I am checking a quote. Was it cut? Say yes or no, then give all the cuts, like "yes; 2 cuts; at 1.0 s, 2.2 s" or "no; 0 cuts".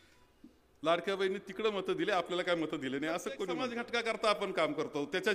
yes; 1 cut; at 3.8 s